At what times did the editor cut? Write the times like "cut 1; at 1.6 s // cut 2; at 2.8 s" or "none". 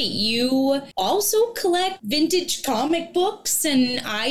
cut 1; at 0.9 s // cut 2; at 2.0 s